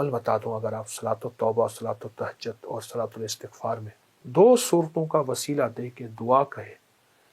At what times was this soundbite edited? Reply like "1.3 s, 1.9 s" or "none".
4.2 s